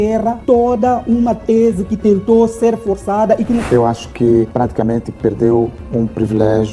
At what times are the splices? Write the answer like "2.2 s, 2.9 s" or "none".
3.6 s